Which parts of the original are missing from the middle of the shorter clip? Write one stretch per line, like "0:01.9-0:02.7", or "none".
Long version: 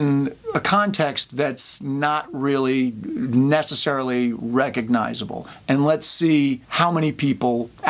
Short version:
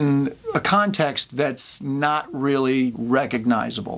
0:03.0-0:04.4

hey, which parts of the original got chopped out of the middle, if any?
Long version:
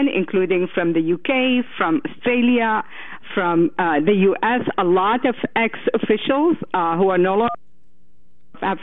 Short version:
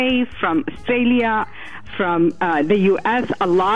none

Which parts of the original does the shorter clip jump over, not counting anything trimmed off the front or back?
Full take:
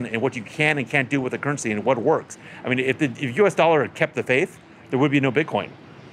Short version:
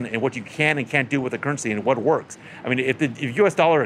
none

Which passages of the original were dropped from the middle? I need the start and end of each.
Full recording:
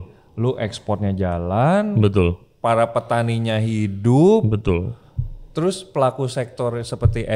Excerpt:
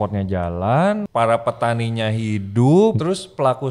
0:01.9-0:02.5
0:04.5-0:05.5

